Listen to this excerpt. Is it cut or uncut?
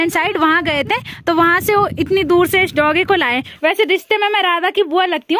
cut